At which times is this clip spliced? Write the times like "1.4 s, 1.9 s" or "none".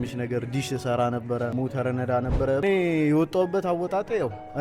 1.5 s, 2.6 s